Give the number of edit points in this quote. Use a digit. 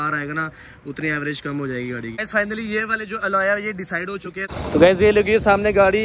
2